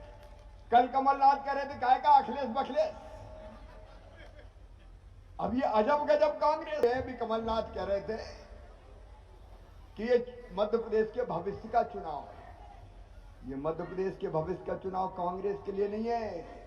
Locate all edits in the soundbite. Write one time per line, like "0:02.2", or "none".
0:06.8